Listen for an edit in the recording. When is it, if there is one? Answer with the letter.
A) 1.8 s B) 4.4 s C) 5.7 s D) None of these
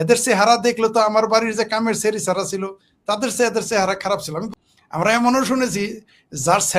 B